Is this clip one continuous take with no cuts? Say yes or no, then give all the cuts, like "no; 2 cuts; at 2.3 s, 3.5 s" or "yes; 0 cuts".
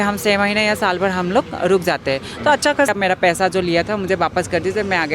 no; 1 cut; at 2.9 s